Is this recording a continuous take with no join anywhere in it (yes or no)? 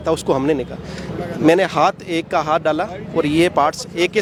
yes